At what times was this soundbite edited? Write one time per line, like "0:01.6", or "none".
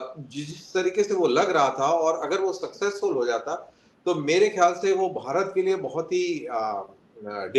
none

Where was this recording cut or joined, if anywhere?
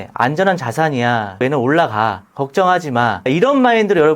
0:01.4
0:03.3

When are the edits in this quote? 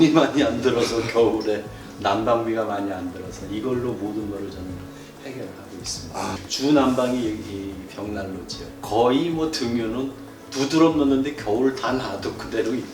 0:06.5
0:08.6

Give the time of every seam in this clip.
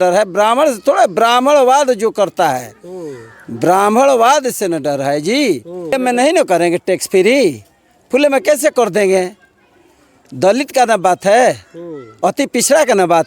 0:06.0

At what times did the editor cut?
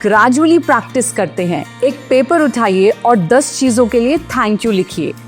0:01.7

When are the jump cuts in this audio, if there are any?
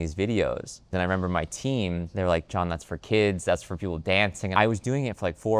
0:00.9
0:02.1
0:04.5

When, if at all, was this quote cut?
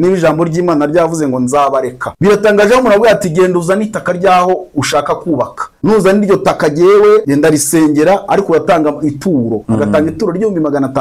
0:02.1
0:05.6
0:07.3

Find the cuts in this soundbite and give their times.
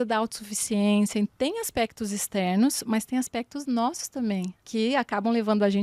0:01.3
0:04.6

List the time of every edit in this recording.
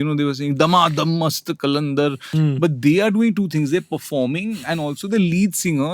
0:02.2

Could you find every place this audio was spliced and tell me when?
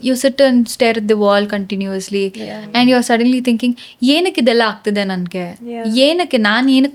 none

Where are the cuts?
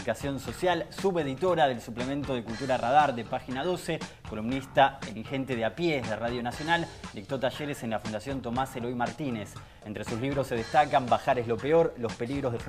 none

